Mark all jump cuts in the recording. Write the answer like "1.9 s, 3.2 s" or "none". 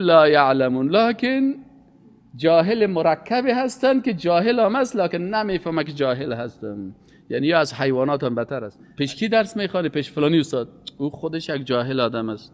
8.8 s